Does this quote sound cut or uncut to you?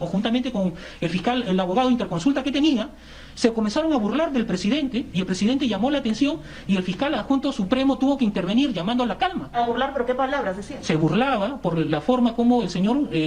uncut